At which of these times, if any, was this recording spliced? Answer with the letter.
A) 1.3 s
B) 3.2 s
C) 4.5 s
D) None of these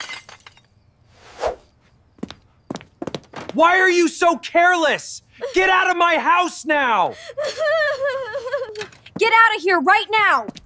D